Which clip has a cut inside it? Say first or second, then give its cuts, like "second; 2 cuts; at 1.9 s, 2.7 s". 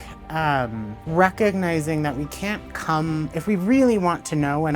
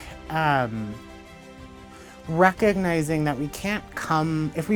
first; 1 cut; at 1.0 s